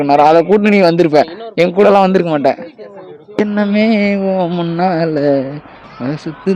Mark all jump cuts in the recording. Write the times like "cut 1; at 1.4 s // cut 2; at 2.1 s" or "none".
cut 1; at 3.4 s